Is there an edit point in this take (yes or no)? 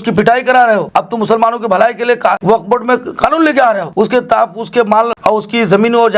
yes